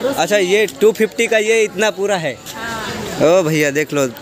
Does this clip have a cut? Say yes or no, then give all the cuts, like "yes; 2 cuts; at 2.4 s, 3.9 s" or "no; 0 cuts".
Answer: no; 0 cuts